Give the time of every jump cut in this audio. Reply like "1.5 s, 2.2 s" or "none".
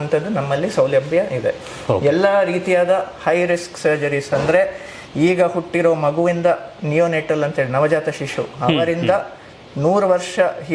none